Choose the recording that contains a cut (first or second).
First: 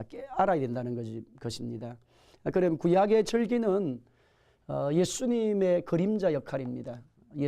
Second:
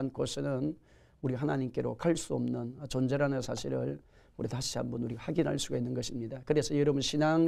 first